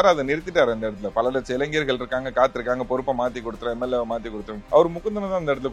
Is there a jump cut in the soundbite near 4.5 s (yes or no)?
yes